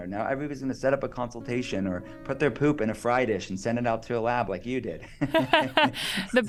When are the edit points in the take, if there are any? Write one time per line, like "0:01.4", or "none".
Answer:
none

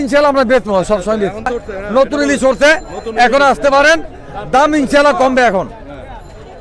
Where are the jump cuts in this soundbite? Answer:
0:01.5

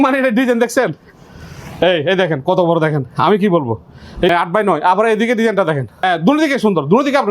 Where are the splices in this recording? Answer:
0:04.3
0:06.0

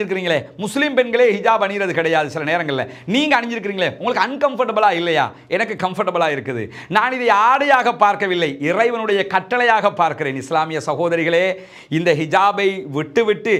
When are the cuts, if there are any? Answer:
none

